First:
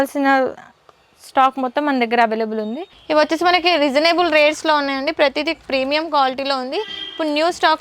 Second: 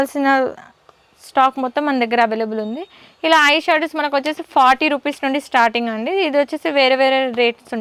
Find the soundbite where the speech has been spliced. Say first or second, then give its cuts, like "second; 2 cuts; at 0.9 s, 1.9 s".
first; 1 cut; at 2.9 s